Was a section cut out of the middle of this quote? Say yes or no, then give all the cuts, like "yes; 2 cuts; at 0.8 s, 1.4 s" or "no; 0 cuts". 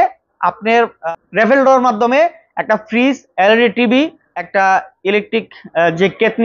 yes; 2 cuts; at 1.0 s, 4.6 s